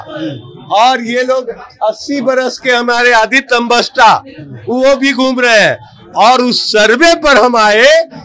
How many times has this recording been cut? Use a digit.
0